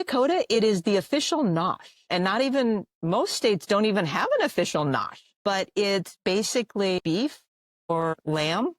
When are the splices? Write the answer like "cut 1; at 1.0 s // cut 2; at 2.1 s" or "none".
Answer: cut 1; at 7.0 s

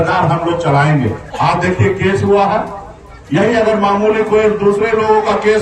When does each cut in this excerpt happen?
cut 1; at 1.2 s

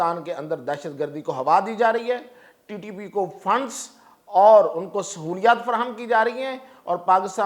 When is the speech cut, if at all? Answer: none

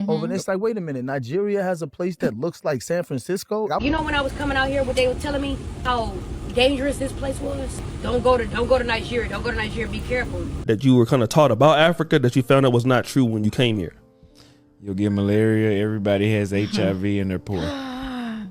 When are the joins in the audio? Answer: cut 1; at 3.8 s // cut 2; at 10.6 s

